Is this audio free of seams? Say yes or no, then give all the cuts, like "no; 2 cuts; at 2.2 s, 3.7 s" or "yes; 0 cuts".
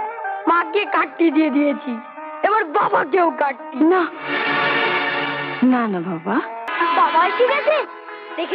no; 1 cut; at 6.6 s